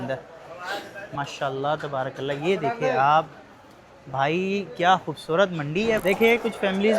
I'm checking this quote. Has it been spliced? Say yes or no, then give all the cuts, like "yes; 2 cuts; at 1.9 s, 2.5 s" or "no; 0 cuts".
yes; 2 cuts; at 1.1 s, 6.0 s